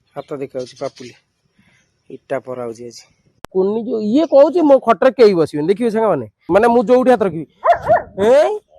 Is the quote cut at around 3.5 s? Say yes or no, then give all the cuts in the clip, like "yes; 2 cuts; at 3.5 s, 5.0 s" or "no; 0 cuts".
yes; 2 cuts; at 3.5 s, 6.4 s